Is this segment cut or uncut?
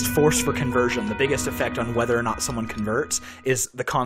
cut